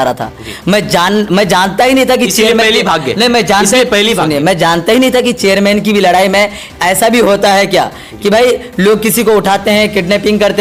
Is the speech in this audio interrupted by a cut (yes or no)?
no